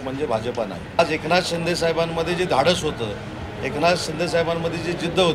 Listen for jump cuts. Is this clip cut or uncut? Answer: cut